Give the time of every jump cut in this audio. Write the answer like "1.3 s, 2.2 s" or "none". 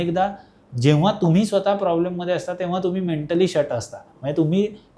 none